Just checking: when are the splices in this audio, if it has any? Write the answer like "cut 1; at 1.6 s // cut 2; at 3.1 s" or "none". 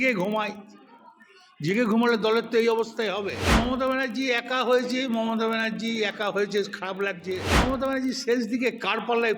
cut 1; at 3.5 s // cut 2; at 7.6 s